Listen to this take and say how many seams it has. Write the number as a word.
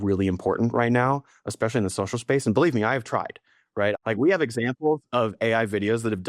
one